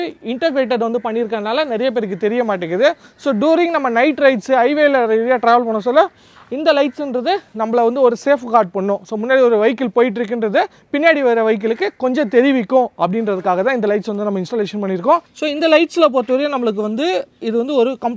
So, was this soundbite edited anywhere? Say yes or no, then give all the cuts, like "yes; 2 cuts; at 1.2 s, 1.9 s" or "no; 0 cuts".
yes; 1 cut; at 15.3 s